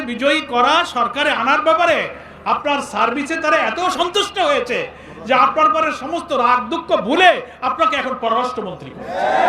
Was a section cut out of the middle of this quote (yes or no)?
no